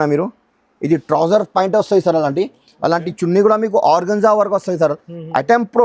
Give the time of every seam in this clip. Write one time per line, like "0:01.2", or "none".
none